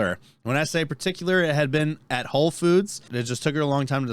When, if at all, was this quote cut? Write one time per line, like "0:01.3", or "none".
0:03.1